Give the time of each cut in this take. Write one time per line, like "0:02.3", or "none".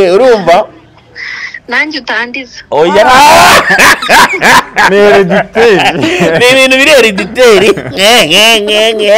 none